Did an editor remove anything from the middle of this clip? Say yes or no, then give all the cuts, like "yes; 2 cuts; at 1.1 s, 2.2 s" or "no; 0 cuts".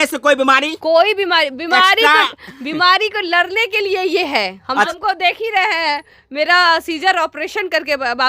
yes; 1 cut; at 4.9 s